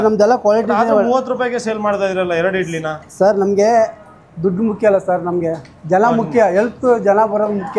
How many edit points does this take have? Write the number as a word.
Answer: zero